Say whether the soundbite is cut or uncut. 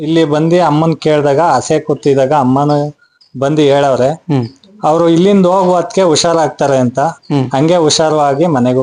uncut